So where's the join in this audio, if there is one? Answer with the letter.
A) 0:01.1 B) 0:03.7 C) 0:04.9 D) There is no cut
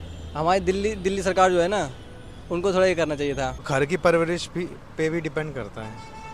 B